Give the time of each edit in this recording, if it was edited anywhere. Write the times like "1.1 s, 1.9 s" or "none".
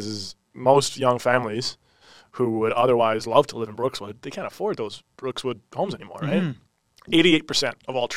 6.7 s